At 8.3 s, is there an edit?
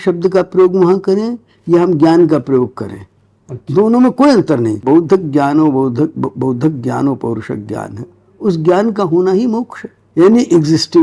no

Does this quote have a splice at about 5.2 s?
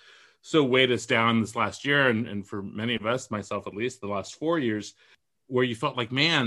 yes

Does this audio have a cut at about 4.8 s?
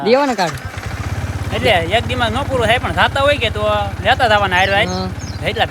no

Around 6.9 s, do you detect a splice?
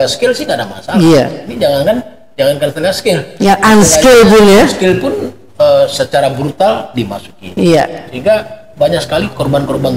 no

